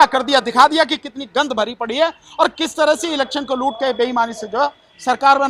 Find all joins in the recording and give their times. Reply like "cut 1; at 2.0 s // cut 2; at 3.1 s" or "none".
none